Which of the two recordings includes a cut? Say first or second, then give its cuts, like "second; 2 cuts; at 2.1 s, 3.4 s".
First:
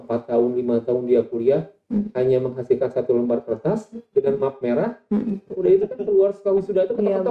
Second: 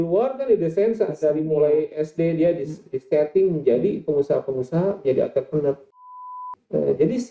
second; 1 cut; at 6.2 s